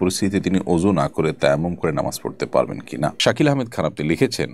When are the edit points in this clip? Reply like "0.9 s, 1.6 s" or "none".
3.2 s